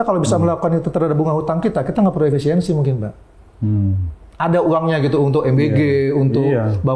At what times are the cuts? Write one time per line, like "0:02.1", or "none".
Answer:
none